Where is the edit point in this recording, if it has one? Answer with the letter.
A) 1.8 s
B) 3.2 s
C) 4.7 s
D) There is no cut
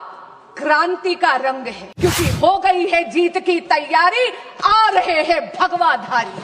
A